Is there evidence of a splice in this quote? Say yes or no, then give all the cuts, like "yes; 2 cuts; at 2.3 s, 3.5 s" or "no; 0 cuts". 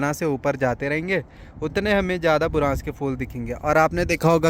no; 0 cuts